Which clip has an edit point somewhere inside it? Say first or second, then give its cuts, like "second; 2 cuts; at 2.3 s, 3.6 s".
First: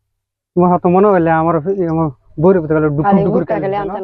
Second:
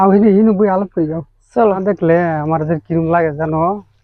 second; 1 cut; at 1.8 s